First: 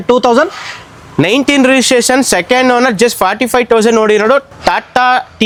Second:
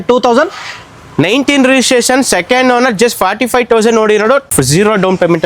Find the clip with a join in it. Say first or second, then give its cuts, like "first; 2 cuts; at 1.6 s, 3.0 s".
second; 1 cut; at 4.5 s